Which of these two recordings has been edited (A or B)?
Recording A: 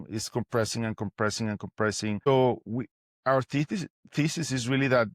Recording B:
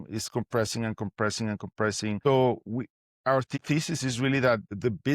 B